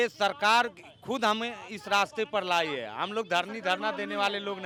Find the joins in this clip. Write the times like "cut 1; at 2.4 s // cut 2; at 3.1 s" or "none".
none